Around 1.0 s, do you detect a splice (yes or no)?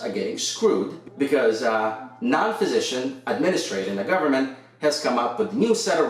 yes